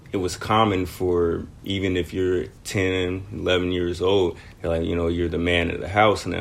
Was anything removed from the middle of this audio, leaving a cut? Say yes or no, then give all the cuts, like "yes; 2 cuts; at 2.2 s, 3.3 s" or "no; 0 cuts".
yes; 2 cuts; at 1.5 s, 2.6 s